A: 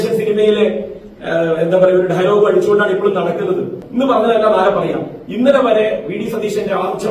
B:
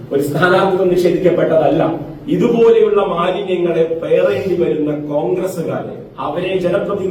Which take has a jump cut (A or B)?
A